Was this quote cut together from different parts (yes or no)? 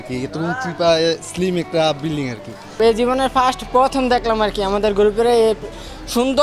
yes